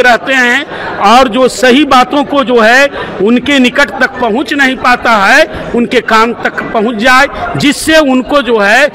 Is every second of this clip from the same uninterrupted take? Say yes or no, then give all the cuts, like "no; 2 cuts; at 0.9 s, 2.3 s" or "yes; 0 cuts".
yes; 0 cuts